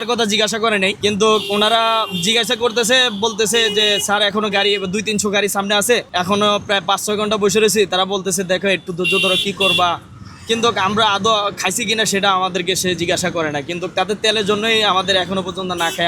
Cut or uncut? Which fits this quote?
uncut